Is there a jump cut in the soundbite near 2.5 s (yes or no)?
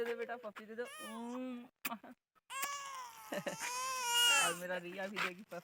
no